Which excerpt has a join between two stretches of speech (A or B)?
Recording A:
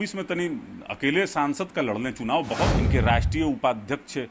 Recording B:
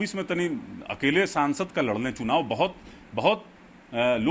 A